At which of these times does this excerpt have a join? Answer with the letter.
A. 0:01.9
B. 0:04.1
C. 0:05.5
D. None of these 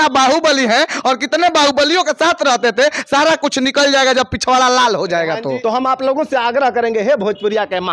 C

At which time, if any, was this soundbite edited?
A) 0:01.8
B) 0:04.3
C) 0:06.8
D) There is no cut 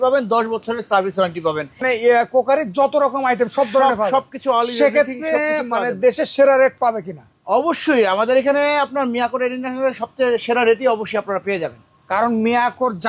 A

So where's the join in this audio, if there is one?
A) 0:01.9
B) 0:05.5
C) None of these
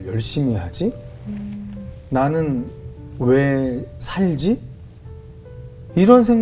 C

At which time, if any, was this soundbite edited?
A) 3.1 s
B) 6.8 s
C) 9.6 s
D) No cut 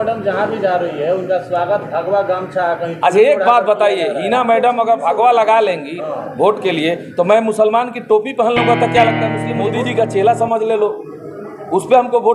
C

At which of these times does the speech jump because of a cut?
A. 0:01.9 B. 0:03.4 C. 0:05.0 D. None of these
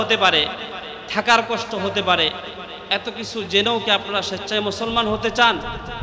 D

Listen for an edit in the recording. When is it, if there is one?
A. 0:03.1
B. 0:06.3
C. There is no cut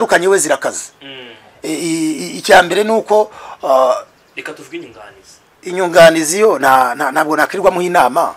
C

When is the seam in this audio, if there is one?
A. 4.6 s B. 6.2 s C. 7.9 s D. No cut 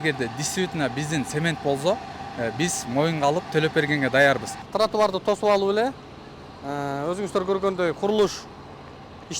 A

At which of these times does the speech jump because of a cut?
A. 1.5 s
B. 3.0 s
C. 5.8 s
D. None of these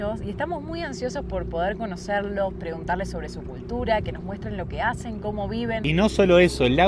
C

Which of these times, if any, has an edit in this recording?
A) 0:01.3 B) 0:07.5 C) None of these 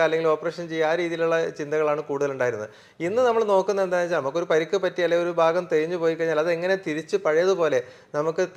C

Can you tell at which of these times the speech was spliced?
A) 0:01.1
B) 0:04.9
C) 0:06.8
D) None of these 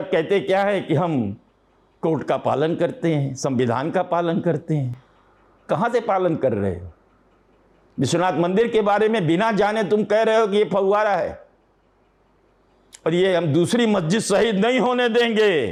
D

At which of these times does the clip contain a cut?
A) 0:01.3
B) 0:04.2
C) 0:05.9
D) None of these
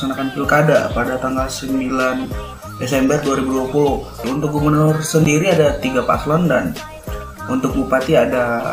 B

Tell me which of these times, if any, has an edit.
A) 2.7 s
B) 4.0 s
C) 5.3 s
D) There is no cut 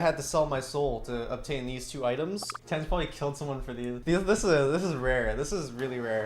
B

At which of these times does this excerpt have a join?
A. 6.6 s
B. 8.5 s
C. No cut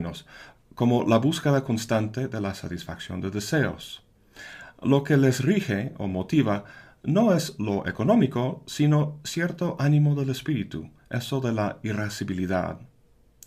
C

